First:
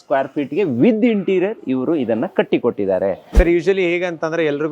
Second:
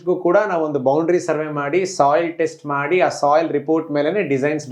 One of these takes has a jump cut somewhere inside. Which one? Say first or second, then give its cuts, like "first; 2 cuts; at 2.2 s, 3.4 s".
first; 1 cut; at 3.3 s